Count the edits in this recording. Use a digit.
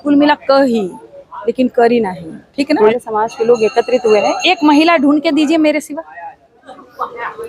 1